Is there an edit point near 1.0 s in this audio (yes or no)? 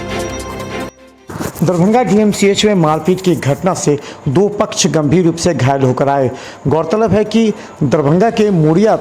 yes